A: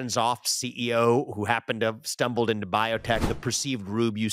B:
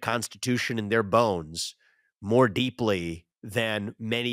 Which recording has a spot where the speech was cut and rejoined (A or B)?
A